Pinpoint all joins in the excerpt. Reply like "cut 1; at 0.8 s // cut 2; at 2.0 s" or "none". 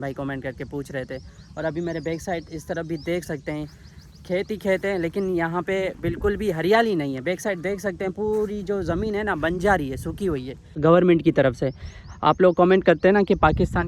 cut 1; at 10.7 s